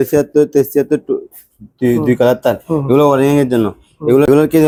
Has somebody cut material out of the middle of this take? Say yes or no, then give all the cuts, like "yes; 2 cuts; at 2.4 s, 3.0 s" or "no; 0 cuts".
no; 0 cuts